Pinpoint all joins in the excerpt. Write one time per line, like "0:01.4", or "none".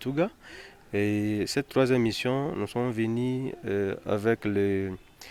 none

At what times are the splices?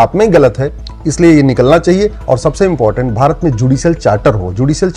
0:02.2

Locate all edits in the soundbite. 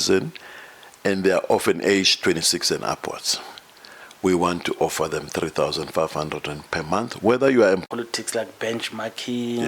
0:07.8

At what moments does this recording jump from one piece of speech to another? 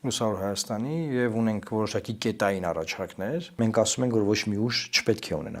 0:03.5

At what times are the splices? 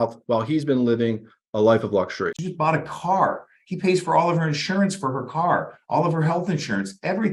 0:02.4

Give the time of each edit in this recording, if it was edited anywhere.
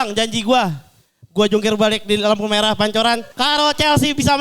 0:03.3

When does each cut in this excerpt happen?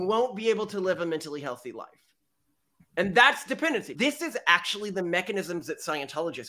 0:03.9

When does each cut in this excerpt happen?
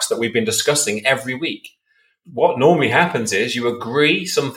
0:02.2

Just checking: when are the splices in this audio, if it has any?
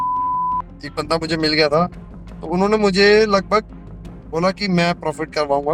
none

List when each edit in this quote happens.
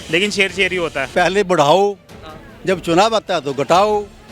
0:01.1

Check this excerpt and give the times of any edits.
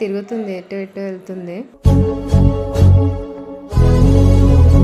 none

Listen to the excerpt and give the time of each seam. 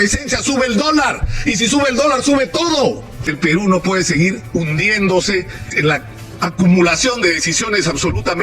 0:03.2
0:05.7

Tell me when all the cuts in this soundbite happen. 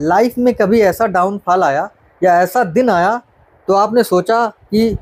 none

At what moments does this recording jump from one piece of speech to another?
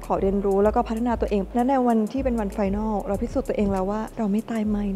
0:01.5

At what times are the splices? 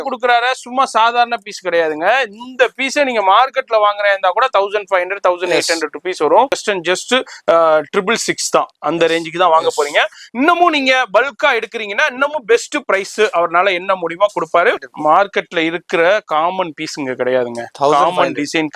0:06.6
0:14.9

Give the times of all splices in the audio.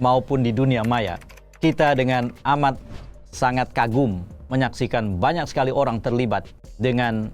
none

